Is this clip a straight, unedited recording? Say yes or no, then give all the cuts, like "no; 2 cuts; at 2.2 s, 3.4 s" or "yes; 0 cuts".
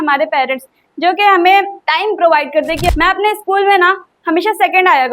no; 2 cuts; at 1.8 s, 2.9 s